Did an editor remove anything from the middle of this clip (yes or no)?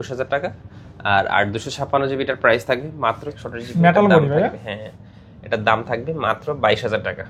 yes